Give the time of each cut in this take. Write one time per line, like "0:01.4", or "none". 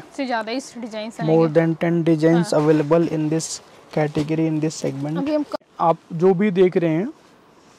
0:05.6